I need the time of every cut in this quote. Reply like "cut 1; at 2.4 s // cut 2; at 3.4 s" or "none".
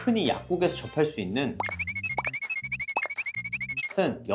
none

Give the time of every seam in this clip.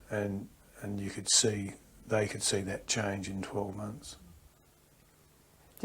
cut 1; at 4.5 s

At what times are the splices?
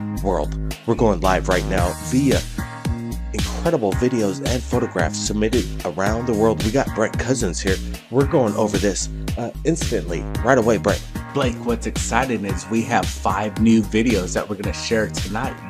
cut 1; at 14.3 s

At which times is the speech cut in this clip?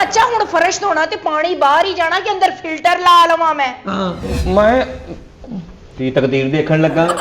cut 1; at 4.3 s

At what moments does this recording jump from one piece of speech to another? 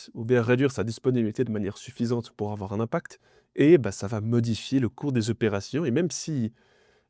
none

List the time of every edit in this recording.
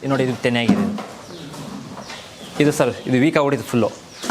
none

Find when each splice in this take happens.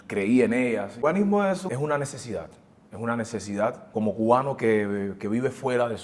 cut 1; at 1.4 s // cut 2; at 3.8 s

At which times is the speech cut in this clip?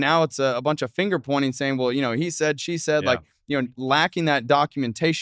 none

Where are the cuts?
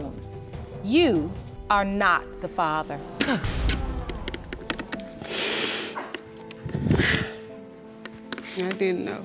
cut 1; at 1.5 s // cut 2; at 8.2 s

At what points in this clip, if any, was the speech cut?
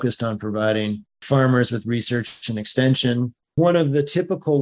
cut 1; at 1.1 s // cut 2; at 3.4 s

